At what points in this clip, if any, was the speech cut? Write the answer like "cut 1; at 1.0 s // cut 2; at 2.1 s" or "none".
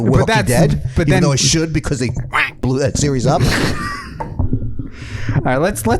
none